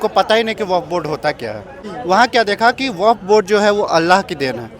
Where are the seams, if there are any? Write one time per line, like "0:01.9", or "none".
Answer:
0:01.9